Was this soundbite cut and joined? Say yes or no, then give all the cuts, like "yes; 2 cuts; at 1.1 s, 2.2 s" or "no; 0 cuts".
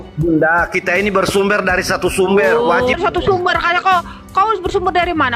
yes; 1 cut; at 3.0 s